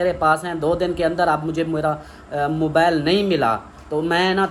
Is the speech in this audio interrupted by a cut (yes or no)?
no